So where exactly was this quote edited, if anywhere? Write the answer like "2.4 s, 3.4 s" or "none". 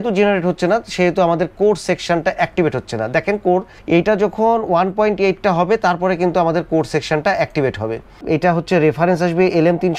3.7 s, 8.2 s